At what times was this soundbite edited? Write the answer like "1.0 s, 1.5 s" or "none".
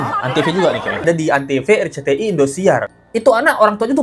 1.0 s, 3.0 s

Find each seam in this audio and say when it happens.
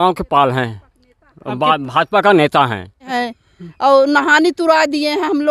3.1 s

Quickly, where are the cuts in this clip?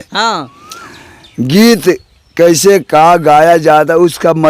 none

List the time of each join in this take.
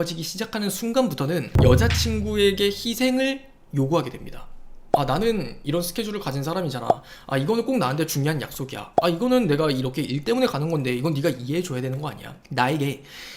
1.5 s

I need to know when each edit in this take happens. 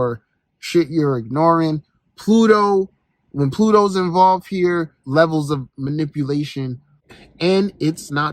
5.0 s

